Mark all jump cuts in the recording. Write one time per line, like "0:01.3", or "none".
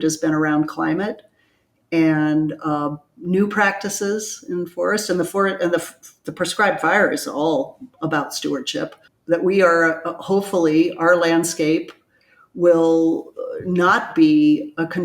0:09.1